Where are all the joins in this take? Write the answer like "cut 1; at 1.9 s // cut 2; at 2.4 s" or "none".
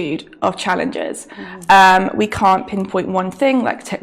none